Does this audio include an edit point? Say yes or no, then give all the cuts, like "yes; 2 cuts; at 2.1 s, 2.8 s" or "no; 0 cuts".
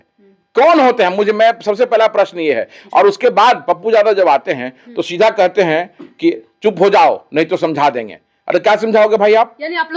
no; 0 cuts